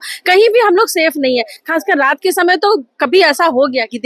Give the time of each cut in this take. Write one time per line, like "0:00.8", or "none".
none